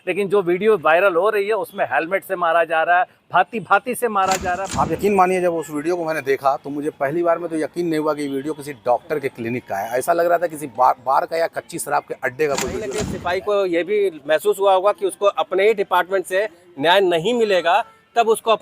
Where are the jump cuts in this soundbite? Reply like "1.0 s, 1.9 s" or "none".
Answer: 4.7 s, 13.1 s